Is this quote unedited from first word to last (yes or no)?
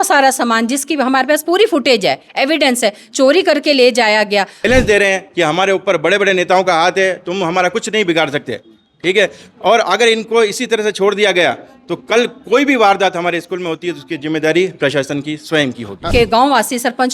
no